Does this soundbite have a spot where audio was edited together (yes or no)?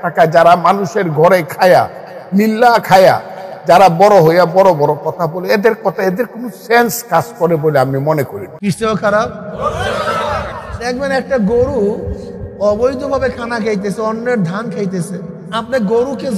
yes